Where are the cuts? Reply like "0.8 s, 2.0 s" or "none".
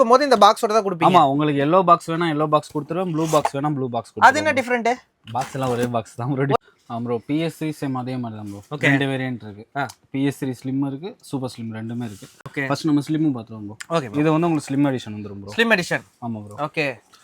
6.6 s